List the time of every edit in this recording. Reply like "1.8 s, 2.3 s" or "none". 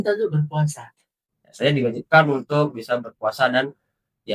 1.2 s